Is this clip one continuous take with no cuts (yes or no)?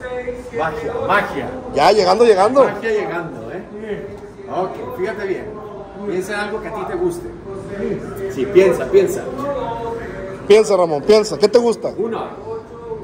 yes